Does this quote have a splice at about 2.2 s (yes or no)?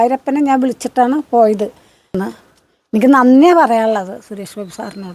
yes